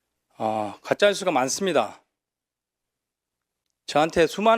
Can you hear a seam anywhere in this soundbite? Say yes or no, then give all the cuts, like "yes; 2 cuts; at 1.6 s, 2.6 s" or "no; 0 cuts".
no; 0 cuts